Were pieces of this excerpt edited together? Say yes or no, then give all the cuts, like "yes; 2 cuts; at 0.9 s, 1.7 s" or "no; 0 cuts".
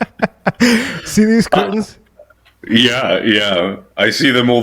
no; 0 cuts